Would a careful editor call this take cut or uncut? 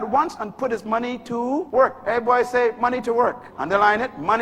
cut